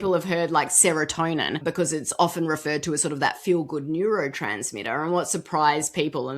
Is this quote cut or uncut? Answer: cut